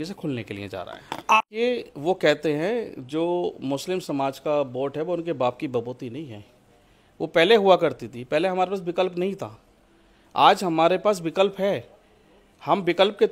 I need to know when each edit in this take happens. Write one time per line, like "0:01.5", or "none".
0:01.4